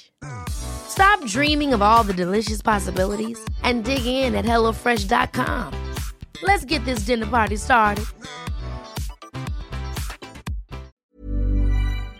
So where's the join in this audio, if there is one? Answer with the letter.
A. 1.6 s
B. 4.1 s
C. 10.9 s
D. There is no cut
C